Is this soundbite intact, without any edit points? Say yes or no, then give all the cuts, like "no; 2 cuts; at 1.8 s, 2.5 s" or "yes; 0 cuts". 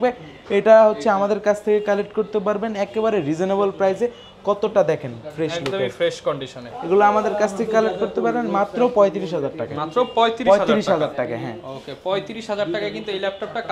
yes; 0 cuts